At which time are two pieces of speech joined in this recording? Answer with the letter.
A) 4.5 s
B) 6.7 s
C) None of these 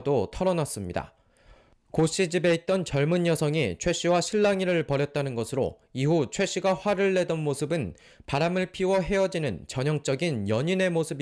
B